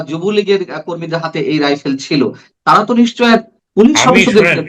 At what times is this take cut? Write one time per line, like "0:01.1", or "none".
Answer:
0:03.6